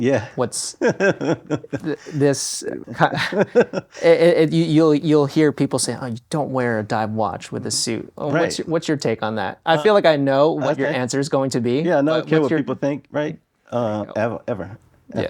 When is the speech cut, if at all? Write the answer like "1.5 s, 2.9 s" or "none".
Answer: 2.8 s